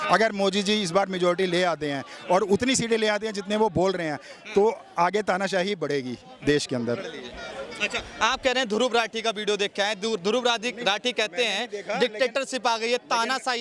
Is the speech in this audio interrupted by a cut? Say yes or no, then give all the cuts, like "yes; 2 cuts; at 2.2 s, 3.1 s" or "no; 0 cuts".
no; 0 cuts